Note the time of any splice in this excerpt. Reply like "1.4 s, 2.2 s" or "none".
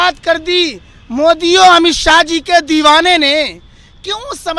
none